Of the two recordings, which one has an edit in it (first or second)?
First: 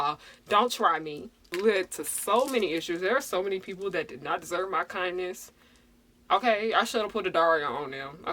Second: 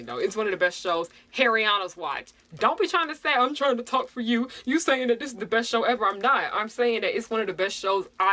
first